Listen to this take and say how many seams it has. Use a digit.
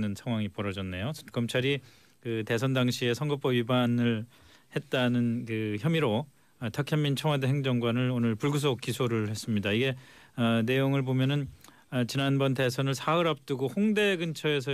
0